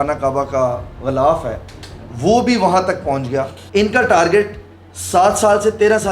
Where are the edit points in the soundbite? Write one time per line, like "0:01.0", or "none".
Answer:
0:03.6